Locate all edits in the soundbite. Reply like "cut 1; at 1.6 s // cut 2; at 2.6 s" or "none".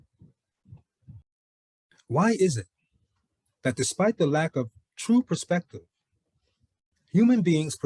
cut 1; at 1.3 s